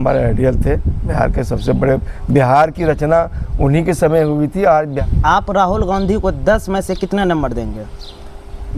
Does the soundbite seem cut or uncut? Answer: cut